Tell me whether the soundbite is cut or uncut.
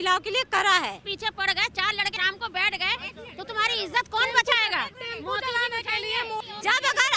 cut